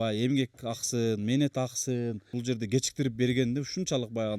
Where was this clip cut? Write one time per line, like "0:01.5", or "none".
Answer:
0:02.3

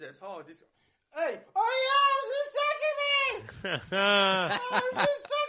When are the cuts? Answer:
none

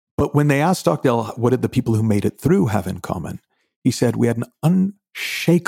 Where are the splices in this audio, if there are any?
0:01.4

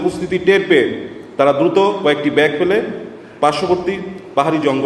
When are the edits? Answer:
none

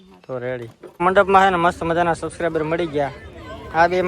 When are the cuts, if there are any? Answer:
0:00.9

